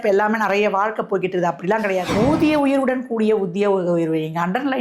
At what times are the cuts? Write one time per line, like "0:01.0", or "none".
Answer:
0:02.1